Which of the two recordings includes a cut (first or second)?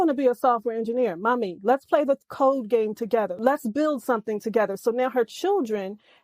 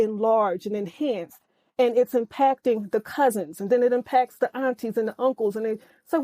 first